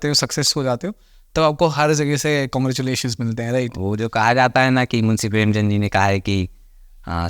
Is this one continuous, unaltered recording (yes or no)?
yes